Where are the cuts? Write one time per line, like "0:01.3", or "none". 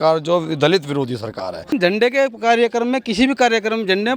0:01.7